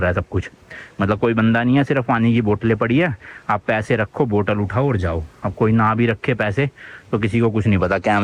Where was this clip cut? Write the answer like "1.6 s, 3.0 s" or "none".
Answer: none